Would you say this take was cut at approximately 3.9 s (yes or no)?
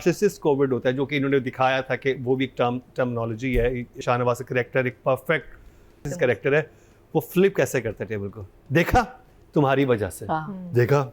yes